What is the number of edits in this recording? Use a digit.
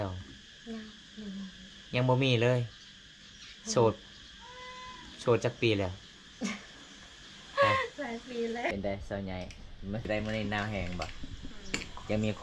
2